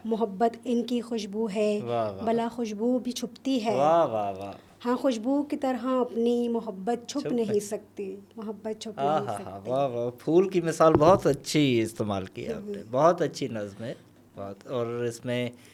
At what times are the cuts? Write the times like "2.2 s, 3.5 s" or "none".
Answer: none